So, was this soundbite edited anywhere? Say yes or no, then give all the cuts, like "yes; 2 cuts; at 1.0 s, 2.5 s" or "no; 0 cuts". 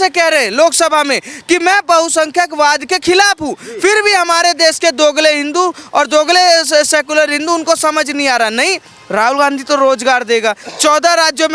no; 0 cuts